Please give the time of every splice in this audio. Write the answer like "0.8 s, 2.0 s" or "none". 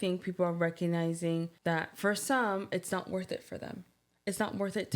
1.5 s